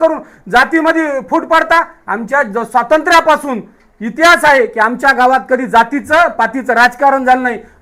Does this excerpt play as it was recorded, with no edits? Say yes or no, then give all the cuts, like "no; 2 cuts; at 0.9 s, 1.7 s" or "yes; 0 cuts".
yes; 0 cuts